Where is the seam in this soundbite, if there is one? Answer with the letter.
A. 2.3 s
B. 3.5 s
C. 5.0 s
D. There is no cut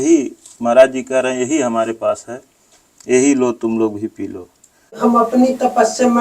C